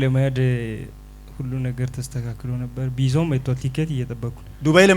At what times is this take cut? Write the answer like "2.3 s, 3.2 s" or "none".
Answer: none